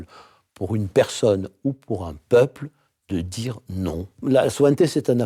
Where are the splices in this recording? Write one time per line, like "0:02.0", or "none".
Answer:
0:04.2